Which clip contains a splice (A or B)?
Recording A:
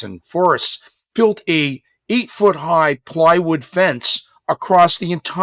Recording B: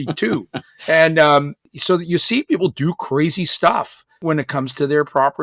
B